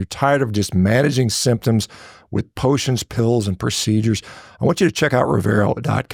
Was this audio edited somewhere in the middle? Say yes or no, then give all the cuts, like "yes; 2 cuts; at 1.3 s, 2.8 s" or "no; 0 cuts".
no; 0 cuts